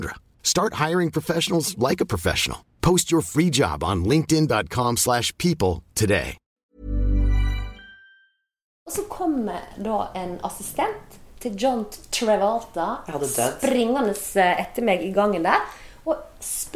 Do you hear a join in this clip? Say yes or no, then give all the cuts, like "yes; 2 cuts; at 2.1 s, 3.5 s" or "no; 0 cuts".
yes; 2 cuts; at 6.4 s, 8.8 s